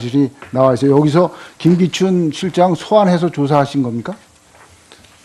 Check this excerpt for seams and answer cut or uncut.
uncut